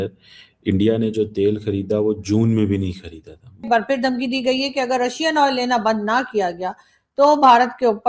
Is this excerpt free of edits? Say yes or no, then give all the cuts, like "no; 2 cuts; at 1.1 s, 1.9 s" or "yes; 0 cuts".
no; 1 cut; at 3.6 s